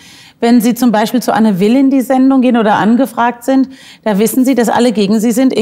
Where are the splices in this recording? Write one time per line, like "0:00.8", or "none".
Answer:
none